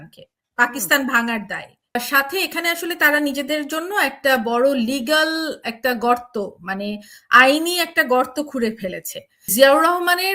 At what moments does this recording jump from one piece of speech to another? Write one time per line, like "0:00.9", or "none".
0:02.0
0:09.5